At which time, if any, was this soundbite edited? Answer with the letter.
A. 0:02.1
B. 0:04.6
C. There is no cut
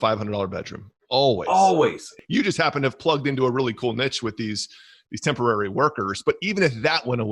A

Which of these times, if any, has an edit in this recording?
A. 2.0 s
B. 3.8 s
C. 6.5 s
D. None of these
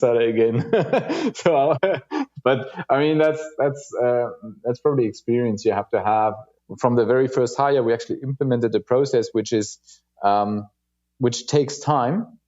C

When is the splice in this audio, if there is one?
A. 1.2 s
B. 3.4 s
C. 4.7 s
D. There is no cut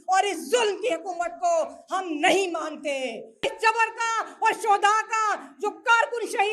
B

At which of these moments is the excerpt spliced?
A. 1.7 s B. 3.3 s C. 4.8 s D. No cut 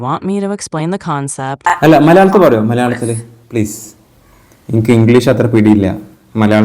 A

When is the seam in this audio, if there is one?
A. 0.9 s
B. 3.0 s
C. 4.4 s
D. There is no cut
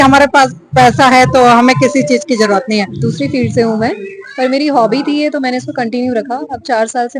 B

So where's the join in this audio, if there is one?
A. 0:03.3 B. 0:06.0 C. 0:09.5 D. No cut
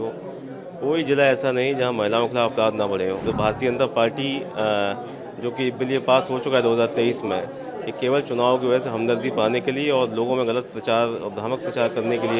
A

